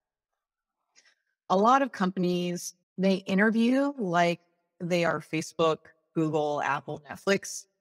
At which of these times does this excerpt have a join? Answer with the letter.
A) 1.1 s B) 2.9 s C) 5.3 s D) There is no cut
D